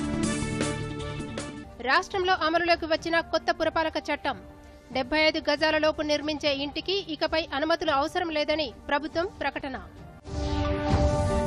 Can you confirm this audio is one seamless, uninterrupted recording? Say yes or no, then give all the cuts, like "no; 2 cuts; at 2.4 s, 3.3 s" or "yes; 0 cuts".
yes; 0 cuts